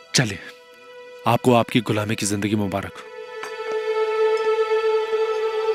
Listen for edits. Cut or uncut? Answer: uncut